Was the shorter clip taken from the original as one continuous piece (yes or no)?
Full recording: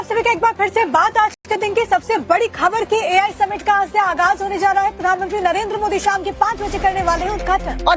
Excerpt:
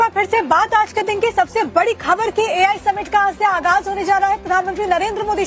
no